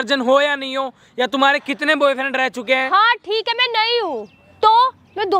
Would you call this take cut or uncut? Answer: uncut